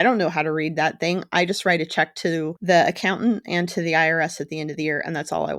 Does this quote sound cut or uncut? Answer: cut